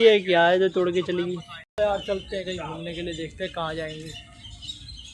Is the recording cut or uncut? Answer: uncut